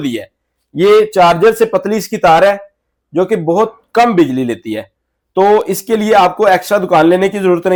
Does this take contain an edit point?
no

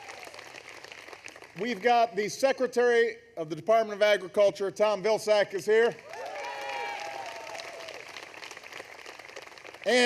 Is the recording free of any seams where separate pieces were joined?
no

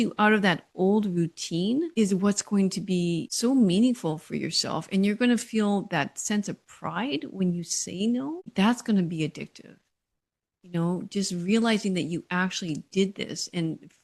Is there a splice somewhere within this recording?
yes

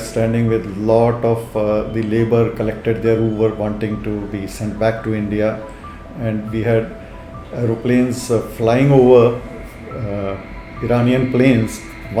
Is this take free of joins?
yes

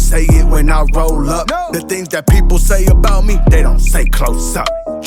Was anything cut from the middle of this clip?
no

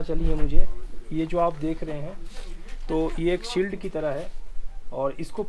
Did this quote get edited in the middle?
no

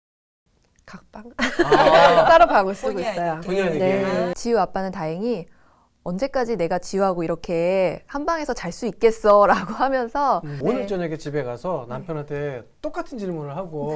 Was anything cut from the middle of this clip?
yes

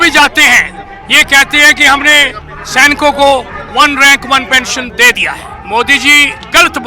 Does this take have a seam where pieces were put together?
yes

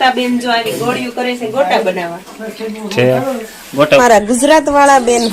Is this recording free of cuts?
no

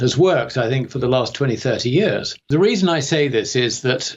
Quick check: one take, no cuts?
no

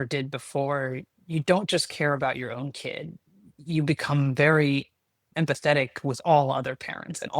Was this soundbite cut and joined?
no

